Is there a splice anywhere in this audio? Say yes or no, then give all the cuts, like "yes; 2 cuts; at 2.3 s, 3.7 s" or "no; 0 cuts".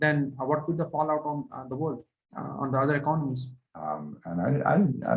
yes; 1 cut; at 3.6 s